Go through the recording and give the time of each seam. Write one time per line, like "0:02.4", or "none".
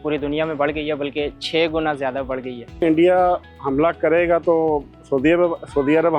0:02.7